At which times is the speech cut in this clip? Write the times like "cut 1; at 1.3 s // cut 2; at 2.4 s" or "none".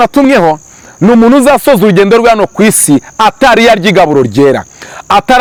none